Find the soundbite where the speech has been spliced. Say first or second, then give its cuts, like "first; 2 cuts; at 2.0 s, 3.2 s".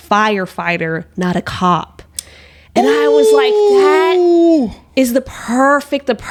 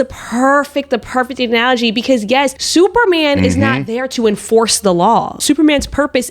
second; 2 cuts; at 2.6 s, 5.3 s